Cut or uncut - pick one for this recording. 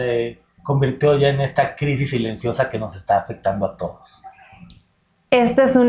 uncut